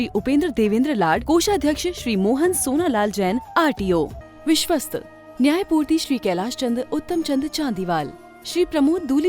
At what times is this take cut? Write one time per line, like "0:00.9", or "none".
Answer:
0:04.2